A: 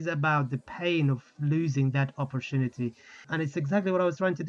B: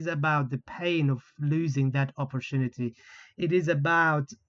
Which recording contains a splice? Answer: A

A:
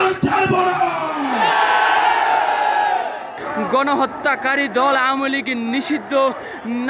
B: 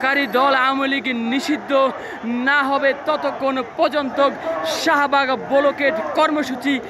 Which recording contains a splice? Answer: A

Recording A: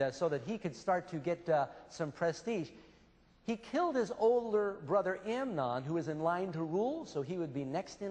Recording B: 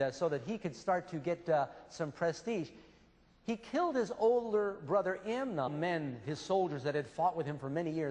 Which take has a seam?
A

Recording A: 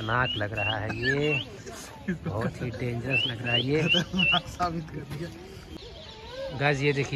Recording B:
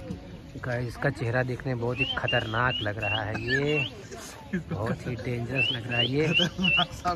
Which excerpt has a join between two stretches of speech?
A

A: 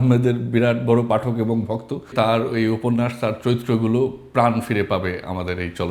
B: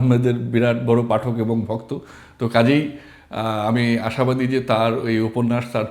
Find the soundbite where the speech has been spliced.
A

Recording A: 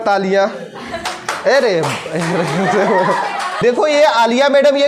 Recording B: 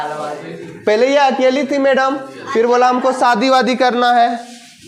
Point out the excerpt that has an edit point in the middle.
A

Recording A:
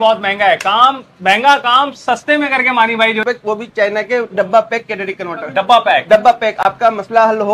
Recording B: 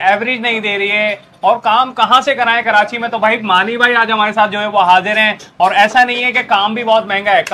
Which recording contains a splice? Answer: A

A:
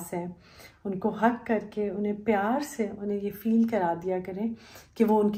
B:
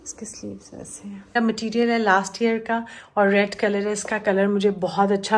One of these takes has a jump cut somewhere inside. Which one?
B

